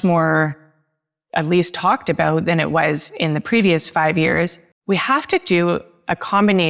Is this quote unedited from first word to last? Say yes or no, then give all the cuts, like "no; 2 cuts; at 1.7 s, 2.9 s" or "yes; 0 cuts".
no; 1 cut; at 4.7 s